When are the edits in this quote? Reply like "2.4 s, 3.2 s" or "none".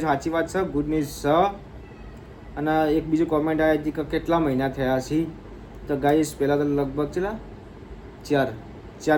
none